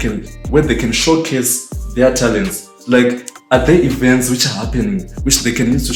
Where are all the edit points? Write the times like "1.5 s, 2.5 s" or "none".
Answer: none